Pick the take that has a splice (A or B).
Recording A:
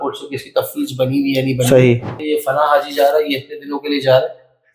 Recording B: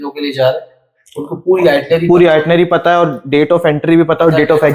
A